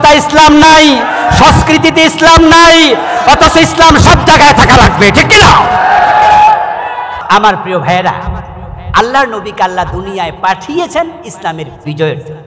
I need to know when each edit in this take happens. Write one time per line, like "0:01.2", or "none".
0:07.2